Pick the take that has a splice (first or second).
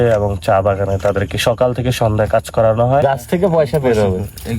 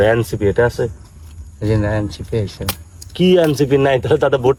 first